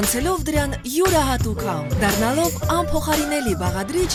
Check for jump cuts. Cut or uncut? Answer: uncut